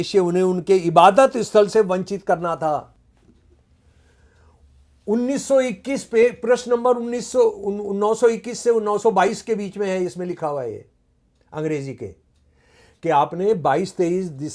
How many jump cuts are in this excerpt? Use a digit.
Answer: 0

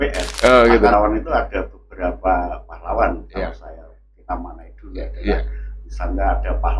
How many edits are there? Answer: 1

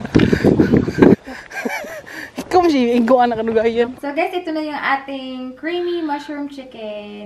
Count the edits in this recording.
2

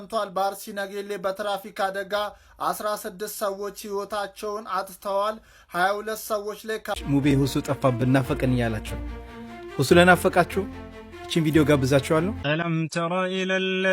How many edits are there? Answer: 2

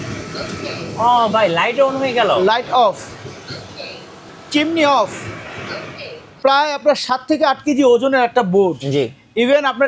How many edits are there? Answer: 2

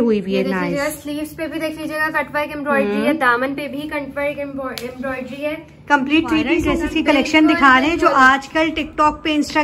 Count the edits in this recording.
1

